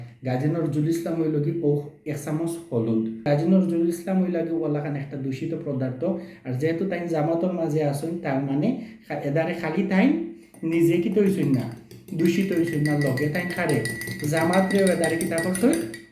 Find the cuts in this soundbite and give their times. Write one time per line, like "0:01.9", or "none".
0:03.2